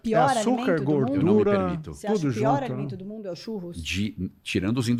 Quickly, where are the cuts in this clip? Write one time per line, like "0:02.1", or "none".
none